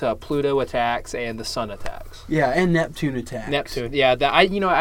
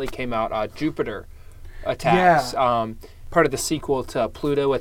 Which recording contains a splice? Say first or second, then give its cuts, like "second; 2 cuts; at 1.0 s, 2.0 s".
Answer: second; 1 cut; at 3.2 s